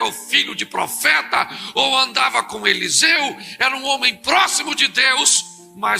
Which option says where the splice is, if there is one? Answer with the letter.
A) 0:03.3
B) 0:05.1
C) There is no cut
C